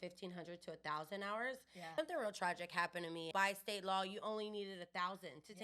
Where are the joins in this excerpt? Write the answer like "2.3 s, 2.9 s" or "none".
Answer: 1.7 s, 3.3 s